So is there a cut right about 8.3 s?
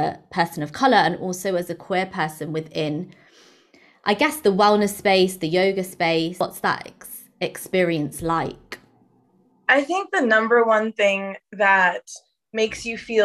no; 1 cut; at 6.4 s

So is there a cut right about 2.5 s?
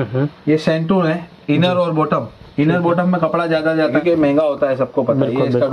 no; 1 cut; at 4.0 s

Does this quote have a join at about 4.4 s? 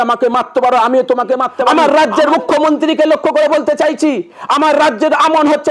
no; 1 cut; at 1.7 s

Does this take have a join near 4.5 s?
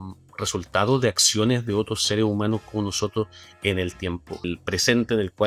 yes; 1 cut; at 4.5 s

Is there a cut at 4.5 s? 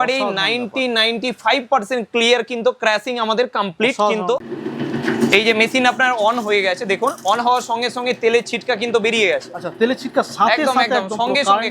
yes; 1 cut; at 4.5 s

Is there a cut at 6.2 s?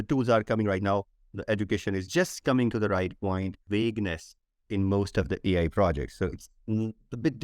no; 1 cut; at 3.6 s

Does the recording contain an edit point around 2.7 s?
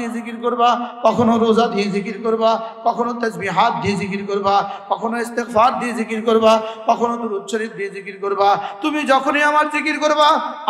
no; 0 cuts

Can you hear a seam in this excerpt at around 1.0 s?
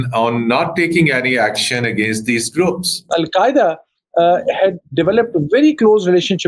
no; 1 cut; at 3.1 s

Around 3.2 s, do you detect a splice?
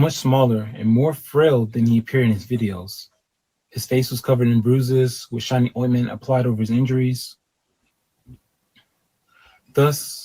no; 1 cut; at 8.0 s

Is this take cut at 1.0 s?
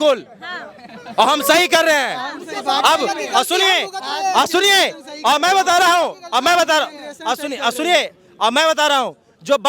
no; 0 cuts

